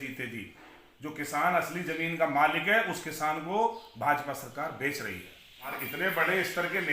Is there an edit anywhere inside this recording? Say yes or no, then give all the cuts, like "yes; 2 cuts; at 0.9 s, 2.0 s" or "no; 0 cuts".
yes; 1 cut; at 5.8 s